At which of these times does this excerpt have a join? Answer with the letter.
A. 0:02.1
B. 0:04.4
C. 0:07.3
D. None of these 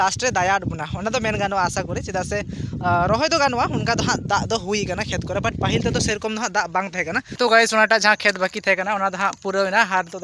C